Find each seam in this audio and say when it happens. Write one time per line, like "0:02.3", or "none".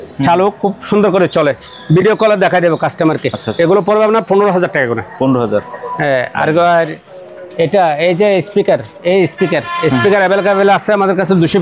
none